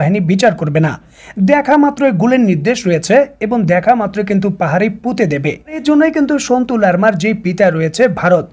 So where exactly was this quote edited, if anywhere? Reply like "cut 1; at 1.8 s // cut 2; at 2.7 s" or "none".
cut 1; at 5.8 s